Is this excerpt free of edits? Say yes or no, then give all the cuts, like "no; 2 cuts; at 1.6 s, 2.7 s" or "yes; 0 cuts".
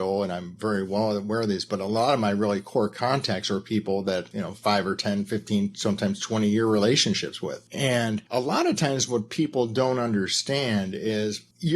no; 1 cut; at 4.3 s